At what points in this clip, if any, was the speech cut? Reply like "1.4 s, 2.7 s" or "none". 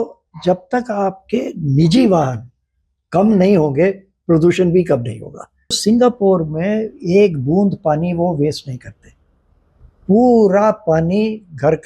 5.8 s

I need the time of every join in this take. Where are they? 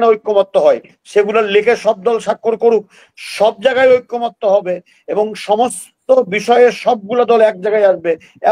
none

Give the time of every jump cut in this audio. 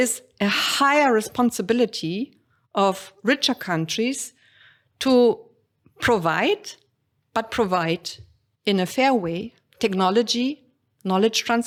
none

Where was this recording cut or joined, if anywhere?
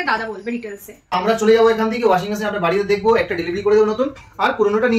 1.1 s

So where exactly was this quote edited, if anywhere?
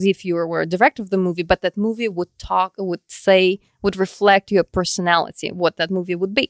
none

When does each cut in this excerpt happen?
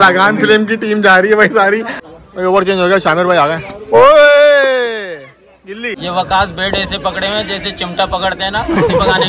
2.0 s, 5.9 s

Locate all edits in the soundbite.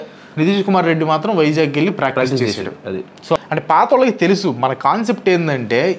3.4 s

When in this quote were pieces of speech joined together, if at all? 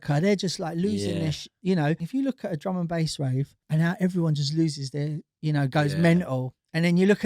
2.0 s, 3.6 s

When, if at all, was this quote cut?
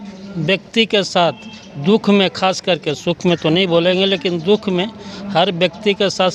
none

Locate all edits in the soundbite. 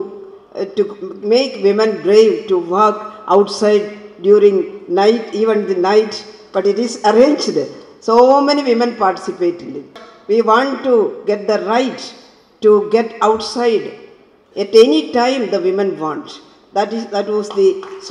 9.9 s

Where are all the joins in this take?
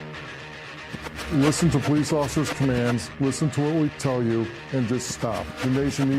1.3 s

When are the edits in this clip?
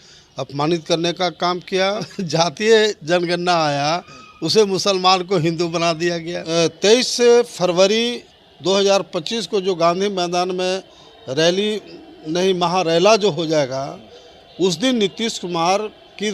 2.2 s, 6.4 s

